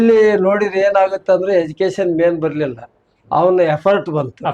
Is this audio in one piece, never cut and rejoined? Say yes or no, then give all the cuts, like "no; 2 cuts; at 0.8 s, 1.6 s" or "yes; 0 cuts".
yes; 0 cuts